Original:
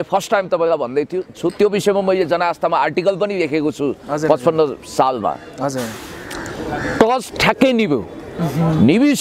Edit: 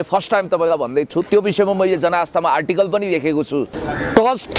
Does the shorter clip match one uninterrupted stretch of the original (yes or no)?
no